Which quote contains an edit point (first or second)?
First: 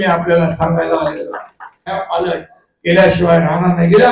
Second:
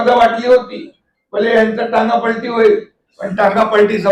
first